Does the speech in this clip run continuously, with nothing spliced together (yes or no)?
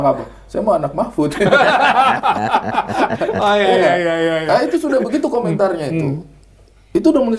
yes